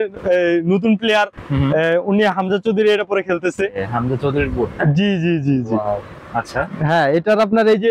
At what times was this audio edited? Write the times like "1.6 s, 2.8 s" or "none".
none